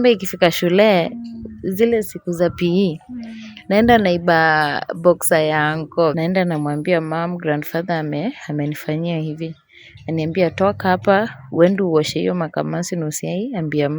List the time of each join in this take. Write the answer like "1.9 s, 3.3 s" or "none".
6.2 s